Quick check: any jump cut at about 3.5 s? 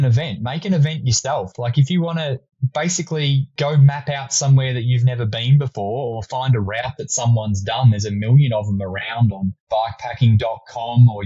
yes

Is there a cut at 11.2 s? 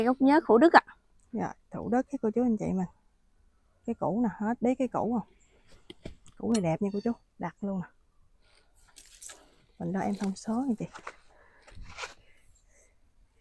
no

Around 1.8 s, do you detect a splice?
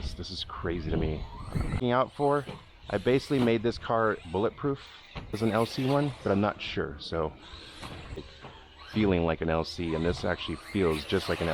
yes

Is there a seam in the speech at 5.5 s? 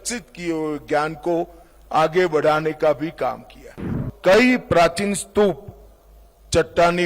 no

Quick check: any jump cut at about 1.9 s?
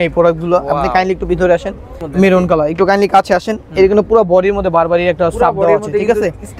yes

